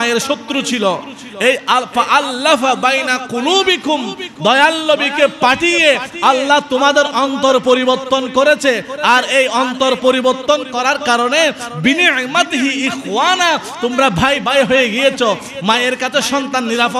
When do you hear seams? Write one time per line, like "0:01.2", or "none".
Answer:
none